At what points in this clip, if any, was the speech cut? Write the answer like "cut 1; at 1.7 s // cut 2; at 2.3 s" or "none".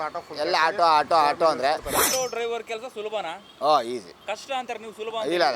cut 1; at 2.1 s // cut 2; at 3.4 s // cut 3; at 4.1 s